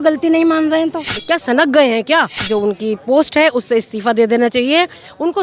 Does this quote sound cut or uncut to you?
cut